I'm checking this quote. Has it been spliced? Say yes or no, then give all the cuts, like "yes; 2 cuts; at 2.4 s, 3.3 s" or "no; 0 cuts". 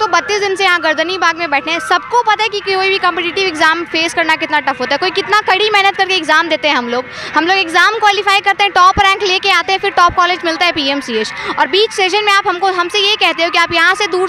no; 0 cuts